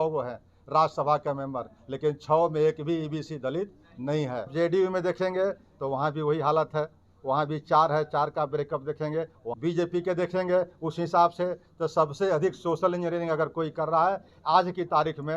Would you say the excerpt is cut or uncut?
cut